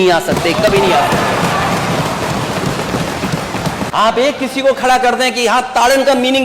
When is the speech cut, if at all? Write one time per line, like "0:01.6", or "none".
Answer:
0:03.9